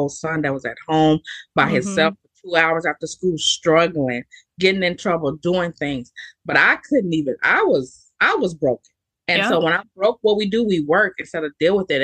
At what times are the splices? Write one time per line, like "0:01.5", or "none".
none